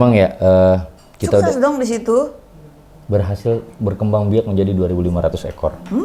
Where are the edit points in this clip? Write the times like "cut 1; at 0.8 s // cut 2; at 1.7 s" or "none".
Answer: none